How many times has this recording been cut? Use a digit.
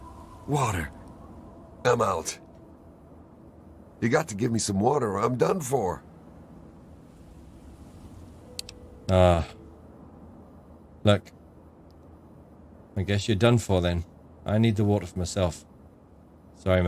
0